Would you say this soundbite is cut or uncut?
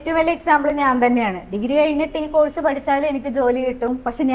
uncut